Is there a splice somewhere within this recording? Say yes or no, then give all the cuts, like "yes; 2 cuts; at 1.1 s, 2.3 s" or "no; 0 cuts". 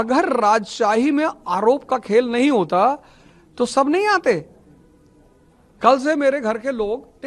no; 0 cuts